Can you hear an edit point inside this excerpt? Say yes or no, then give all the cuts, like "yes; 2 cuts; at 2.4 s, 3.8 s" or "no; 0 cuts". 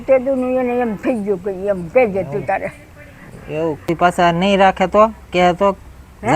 yes; 1 cut; at 3.8 s